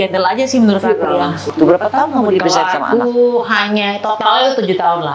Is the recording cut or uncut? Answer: cut